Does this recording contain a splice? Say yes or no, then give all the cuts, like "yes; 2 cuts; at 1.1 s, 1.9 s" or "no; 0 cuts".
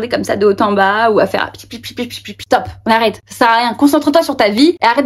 yes; 1 cut; at 2.3 s